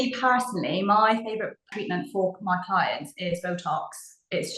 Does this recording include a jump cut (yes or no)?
yes